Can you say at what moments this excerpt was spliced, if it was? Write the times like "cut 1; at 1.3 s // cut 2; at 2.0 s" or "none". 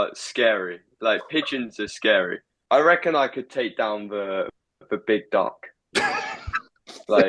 cut 1; at 2.5 s